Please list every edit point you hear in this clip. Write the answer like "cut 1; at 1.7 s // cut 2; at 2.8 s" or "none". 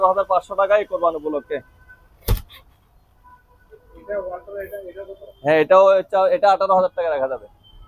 none